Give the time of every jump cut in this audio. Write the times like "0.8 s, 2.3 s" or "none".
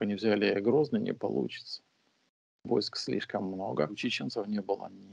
4.0 s